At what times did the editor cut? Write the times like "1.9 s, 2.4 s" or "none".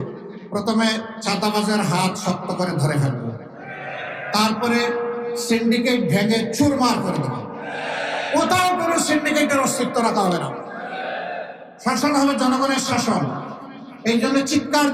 none